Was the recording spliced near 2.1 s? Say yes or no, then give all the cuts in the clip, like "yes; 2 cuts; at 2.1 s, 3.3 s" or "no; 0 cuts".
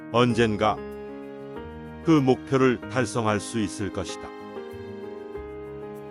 no; 0 cuts